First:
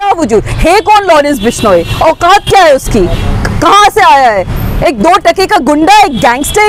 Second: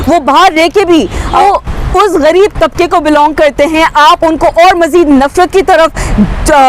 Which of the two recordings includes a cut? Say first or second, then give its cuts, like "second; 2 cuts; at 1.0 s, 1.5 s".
second; 1 cut; at 1.4 s